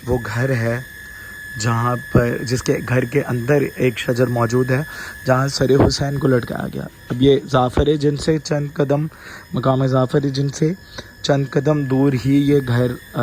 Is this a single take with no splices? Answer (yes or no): yes